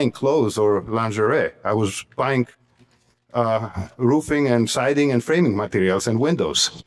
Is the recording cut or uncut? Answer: uncut